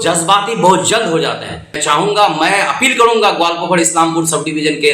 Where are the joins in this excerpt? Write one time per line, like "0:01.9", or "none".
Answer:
0:01.8